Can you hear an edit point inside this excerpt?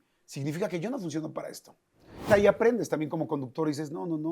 yes; 1 cut; at 2.2 s

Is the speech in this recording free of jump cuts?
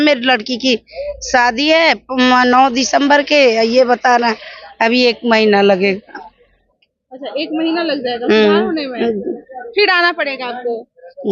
yes; 0 cuts

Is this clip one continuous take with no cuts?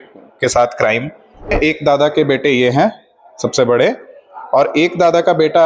no; 1 cut; at 1.5 s

